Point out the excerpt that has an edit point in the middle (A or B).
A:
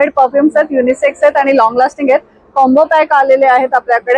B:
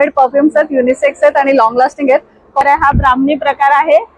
B